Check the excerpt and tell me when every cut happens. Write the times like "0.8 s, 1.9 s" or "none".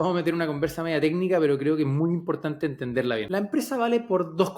3.3 s